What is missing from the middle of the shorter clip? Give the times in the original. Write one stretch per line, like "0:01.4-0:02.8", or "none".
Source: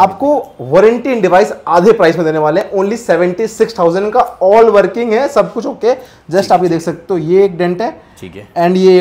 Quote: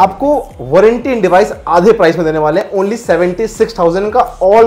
none

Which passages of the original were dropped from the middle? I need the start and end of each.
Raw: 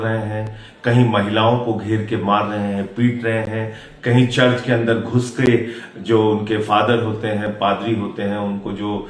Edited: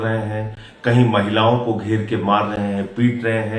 none

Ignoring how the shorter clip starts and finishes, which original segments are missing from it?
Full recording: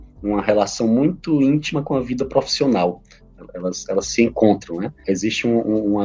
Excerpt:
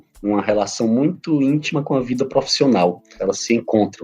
0:03.1-0:03.8

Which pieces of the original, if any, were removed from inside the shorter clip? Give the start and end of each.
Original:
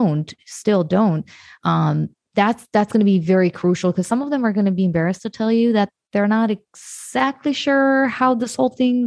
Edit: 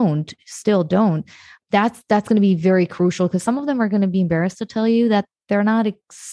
0:01.5-0:02.1

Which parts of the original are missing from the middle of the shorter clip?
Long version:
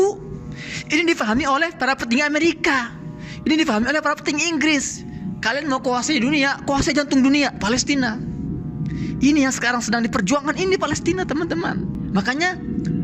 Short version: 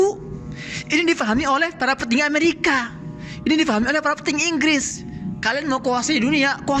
none

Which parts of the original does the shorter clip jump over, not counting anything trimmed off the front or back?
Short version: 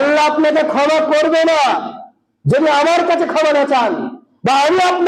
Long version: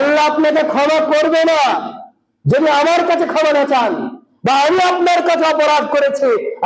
none

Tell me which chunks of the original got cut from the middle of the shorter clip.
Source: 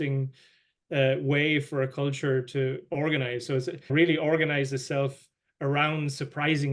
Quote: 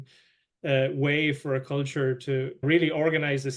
0:02.8-0:03.8

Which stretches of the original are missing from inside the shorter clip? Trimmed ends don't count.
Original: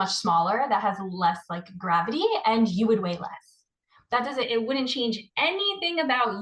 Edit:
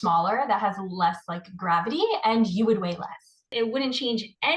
0:03.7-0:04.5

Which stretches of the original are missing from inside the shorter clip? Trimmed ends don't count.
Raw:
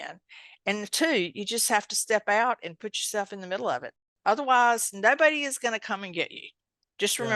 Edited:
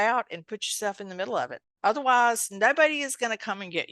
0:04.0-0:04.1

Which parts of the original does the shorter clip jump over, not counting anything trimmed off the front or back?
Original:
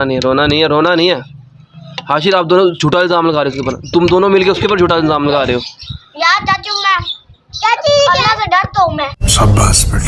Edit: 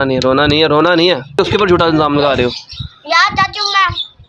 0:01.4-0:04.5

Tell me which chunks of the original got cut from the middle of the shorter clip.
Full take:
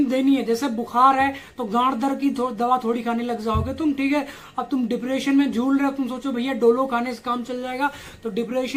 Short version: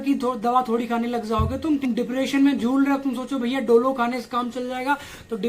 0:04.0-0:04.8

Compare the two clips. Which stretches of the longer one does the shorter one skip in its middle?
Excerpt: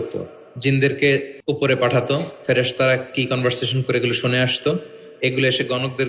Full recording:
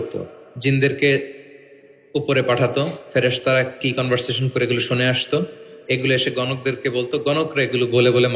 0:01.3-0:02.0

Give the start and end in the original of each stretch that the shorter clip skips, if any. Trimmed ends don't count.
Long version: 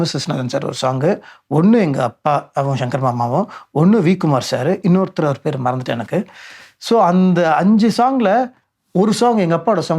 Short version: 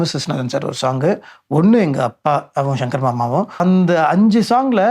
0:03.6-0:07.1

